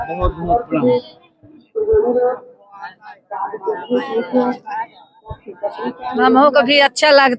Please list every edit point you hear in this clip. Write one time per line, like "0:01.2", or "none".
0:06.2